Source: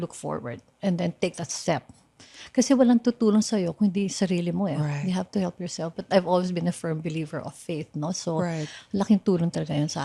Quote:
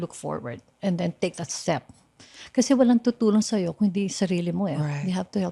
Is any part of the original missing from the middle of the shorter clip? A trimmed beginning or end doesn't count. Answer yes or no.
no